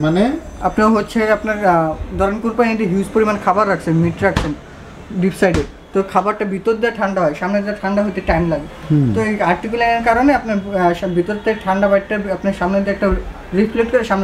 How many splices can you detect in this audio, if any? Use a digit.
0